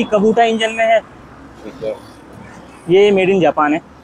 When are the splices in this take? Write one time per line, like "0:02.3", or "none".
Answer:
none